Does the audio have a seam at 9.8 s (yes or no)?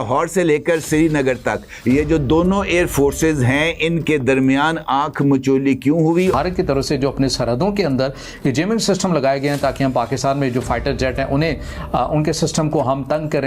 no